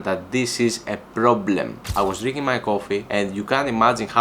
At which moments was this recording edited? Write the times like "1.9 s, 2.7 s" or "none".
1.8 s, 3.1 s